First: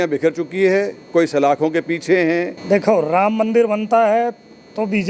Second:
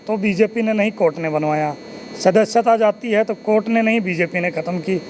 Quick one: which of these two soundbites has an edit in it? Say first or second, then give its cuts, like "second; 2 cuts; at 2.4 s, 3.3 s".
first; 1 cut; at 2.6 s